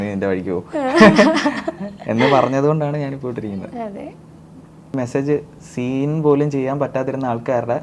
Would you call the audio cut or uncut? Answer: cut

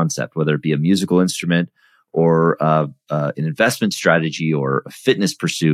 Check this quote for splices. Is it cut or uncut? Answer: uncut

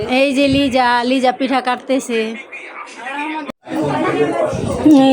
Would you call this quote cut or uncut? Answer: cut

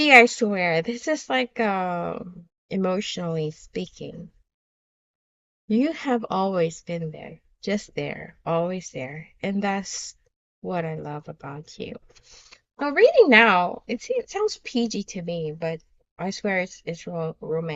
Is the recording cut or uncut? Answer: uncut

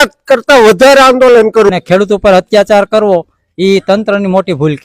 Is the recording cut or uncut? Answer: cut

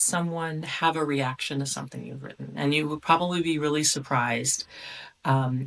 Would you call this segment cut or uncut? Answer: uncut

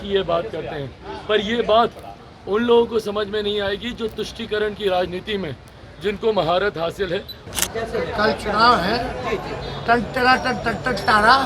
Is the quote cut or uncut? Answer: cut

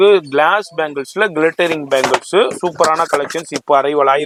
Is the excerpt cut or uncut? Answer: uncut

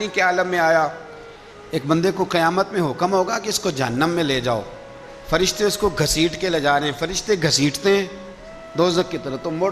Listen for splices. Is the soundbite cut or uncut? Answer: cut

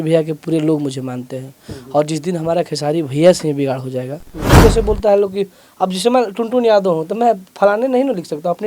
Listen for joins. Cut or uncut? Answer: cut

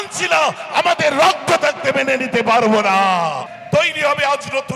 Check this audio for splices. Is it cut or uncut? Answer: cut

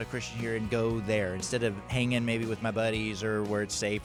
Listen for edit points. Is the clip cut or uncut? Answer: uncut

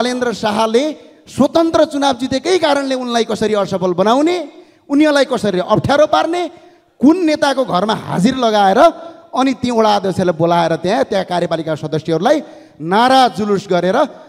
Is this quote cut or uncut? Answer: uncut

